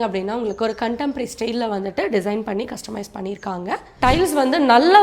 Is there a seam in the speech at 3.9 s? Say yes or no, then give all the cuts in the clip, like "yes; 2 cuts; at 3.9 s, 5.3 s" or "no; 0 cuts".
yes; 1 cut; at 3.9 s